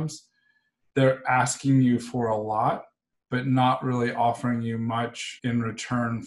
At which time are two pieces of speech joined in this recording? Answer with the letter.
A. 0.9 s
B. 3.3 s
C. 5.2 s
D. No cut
C